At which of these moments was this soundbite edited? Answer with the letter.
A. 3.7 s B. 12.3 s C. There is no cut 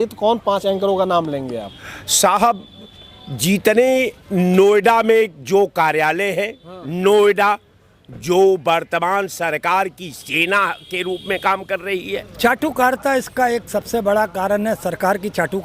B